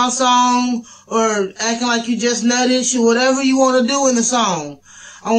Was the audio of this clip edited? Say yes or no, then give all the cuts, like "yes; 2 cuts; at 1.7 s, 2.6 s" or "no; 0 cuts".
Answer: yes; 1 cut; at 4.2 s